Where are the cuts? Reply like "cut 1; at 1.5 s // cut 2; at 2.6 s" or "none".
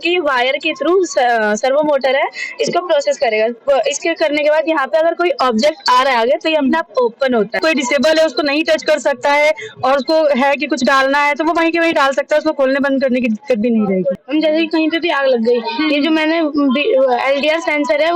cut 1; at 7.6 s // cut 2; at 14.2 s